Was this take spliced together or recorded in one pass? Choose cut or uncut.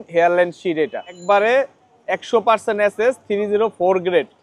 cut